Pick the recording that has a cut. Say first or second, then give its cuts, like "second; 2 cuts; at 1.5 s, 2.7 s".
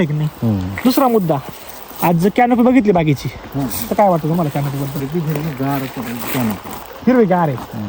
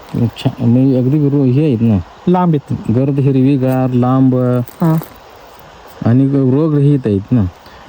first; 1 cut; at 5.0 s